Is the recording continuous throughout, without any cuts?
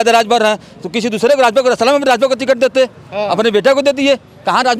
yes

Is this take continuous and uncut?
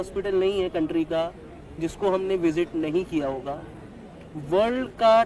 yes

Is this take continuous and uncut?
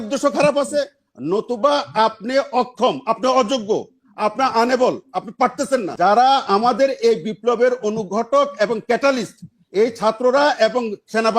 no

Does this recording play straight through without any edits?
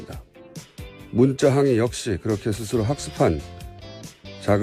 no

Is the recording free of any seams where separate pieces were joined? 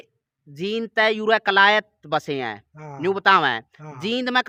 yes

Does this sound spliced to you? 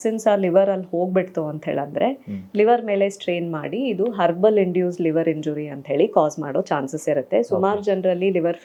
no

